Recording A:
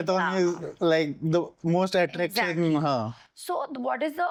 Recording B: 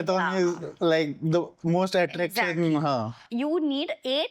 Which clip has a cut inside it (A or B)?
B